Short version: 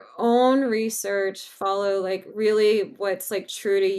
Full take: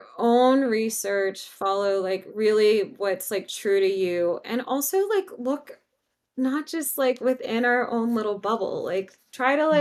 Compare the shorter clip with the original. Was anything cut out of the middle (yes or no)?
no